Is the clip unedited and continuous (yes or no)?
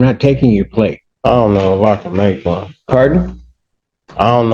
no